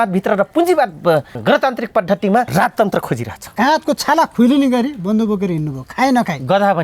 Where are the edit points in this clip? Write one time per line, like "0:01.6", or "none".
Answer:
0:01.3
0:02.5
0:03.4